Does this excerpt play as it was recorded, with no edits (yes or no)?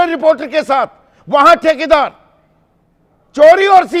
yes